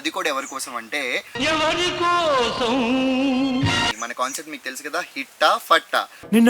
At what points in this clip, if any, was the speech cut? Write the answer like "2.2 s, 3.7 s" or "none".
3.9 s